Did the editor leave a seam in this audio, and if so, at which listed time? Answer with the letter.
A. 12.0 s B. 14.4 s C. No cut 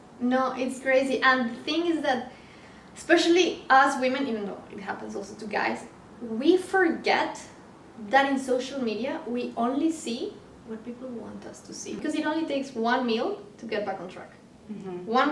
A